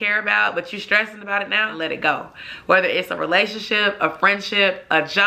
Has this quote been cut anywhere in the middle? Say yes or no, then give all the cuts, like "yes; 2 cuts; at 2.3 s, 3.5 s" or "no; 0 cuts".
yes; 1 cut; at 1.7 s